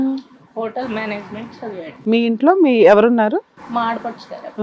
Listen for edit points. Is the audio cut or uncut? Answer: cut